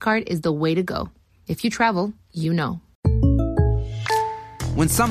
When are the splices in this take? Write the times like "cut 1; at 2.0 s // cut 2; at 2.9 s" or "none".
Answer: cut 1; at 2.9 s

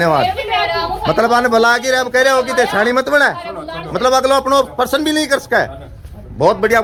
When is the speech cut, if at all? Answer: none

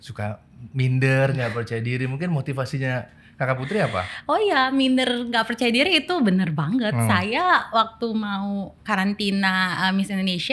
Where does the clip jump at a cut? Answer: none

